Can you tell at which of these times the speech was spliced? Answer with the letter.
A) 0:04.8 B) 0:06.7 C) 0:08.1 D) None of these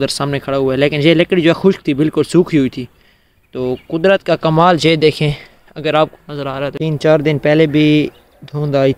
B